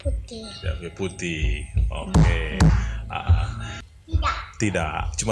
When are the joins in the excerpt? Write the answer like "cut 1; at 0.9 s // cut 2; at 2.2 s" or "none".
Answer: cut 1; at 3.8 s